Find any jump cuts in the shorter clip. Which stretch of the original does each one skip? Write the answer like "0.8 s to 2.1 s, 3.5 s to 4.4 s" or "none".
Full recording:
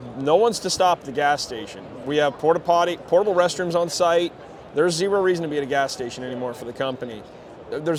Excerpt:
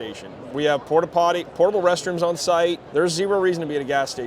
4.3 s to 4.6 s